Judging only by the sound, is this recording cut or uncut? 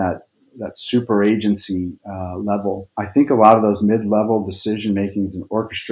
cut